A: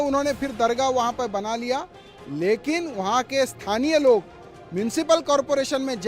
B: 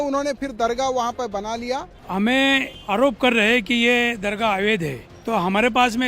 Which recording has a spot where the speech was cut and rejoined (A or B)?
B